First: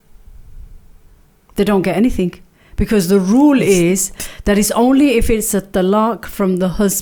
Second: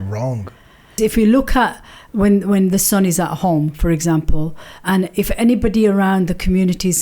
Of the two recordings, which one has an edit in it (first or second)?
second